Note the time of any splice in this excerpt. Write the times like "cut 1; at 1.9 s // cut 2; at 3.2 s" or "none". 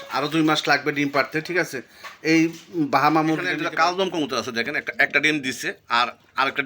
cut 1; at 3.6 s